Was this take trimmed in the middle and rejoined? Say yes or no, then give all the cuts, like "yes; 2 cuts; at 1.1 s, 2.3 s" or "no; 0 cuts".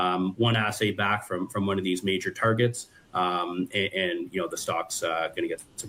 no; 0 cuts